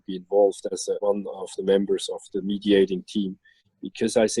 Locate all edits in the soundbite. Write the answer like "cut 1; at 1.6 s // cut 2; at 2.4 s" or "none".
cut 1; at 1.0 s